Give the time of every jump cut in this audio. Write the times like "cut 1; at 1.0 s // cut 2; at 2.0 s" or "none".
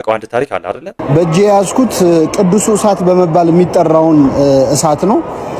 cut 1; at 1.0 s

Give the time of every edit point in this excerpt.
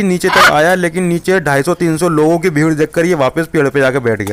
none

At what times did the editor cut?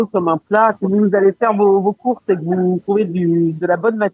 cut 1; at 0.8 s // cut 2; at 2.8 s

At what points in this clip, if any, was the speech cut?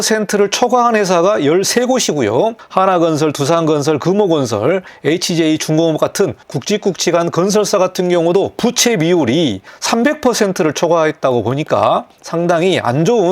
cut 1; at 2.6 s // cut 2; at 4.9 s // cut 3; at 6.5 s // cut 4; at 9.7 s // cut 5; at 12.2 s

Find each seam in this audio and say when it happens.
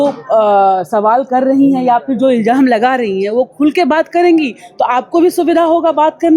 none

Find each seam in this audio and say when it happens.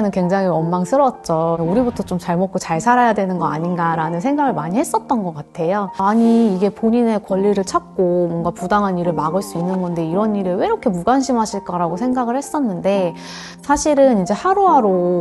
cut 1; at 1.6 s // cut 2; at 6.0 s

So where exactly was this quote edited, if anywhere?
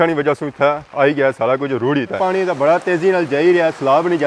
cut 1; at 2.2 s

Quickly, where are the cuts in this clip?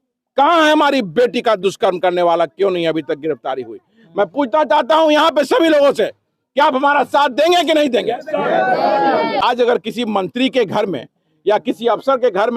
cut 1; at 9.4 s

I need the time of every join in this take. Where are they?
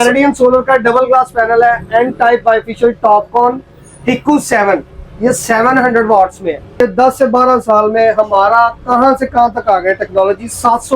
cut 1; at 6.8 s

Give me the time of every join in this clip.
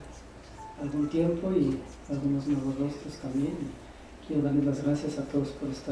cut 1; at 2.2 s

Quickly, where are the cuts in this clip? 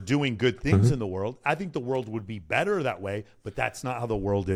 none

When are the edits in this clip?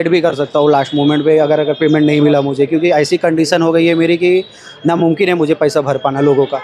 none

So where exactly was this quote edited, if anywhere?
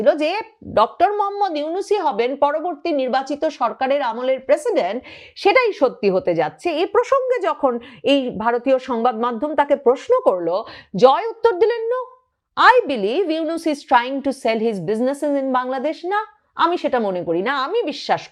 none

